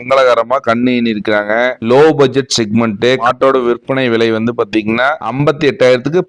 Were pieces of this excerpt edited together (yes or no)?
yes